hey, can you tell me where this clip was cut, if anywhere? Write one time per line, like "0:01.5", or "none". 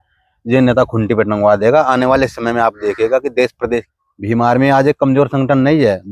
0:03.9